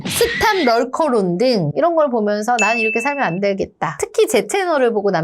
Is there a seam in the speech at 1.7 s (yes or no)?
yes